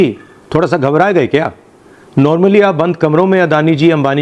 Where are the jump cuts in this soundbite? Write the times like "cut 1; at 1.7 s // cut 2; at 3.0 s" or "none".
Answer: none